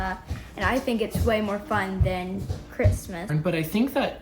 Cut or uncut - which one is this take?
cut